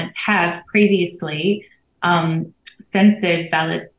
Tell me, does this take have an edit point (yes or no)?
no